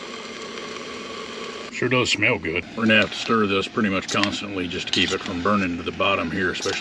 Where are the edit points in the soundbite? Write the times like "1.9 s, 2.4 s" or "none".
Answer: 1.7 s, 2.7 s